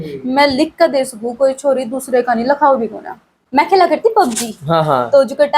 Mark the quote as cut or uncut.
cut